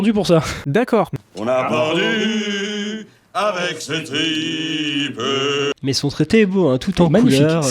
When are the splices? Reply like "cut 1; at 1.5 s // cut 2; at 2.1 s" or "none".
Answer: cut 1; at 1.2 s